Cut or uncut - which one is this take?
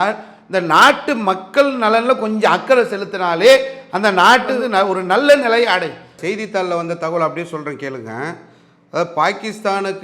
cut